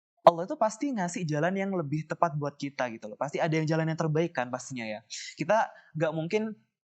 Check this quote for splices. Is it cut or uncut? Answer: uncut